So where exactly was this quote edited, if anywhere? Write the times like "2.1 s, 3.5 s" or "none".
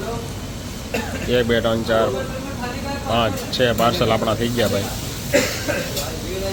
none